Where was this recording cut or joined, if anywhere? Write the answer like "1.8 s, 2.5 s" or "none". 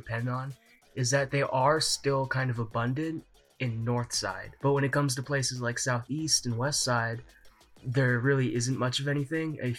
4.5 s